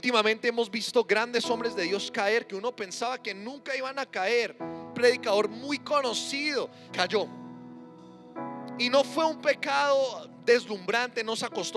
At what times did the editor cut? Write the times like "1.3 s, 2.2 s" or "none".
4.9 s, 6.8 s